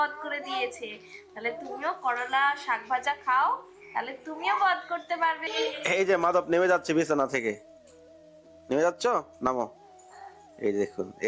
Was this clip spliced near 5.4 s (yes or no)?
yes